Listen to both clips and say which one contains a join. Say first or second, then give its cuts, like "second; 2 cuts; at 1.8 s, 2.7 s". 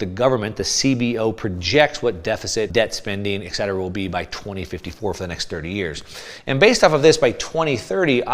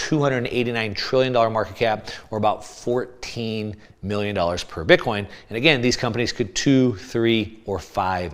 first; 1 cut; at 2.7 s